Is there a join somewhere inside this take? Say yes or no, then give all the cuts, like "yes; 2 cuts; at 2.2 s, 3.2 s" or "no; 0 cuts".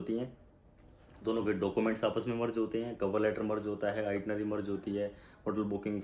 no; 0 cuts